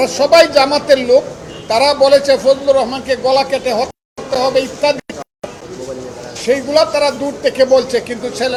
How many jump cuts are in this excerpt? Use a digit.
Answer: 0